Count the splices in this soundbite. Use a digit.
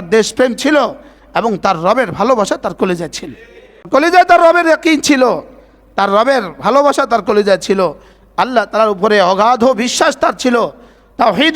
1